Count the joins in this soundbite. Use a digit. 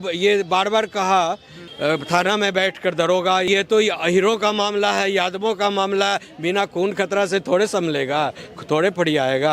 2